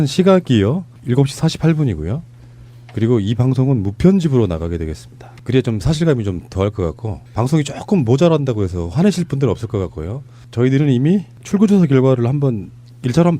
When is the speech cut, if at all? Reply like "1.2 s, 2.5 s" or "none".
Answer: 2.3 s